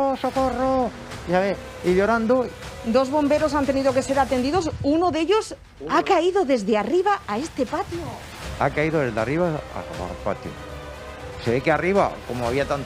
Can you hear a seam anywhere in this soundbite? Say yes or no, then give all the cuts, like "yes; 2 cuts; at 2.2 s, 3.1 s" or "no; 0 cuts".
yes; 1 cut; at 2.5 s